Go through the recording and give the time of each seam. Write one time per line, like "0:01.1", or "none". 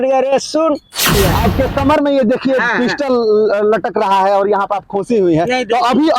0:01.1